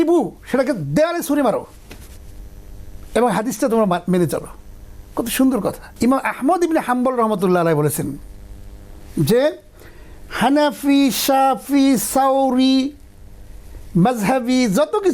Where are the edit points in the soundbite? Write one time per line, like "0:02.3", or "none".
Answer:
0:05.8